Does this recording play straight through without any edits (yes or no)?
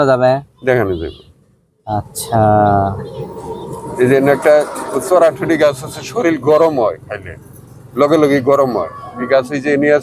yes